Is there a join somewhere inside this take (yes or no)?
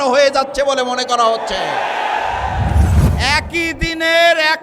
yes